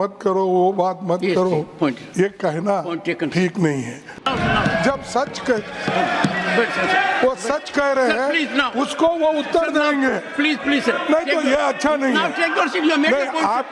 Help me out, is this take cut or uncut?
cut